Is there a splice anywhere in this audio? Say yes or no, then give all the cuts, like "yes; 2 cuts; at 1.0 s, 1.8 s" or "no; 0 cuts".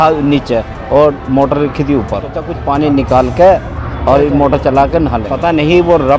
yes; 2 cuts; at 2.5 s, 5.3 s